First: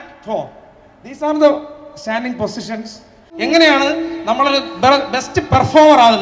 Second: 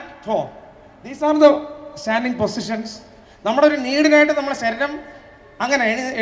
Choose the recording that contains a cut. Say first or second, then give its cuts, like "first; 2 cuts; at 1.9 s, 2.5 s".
first; 1 cut; at 3.3 s